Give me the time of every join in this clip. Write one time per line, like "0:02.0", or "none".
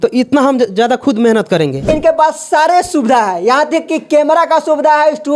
0:01.9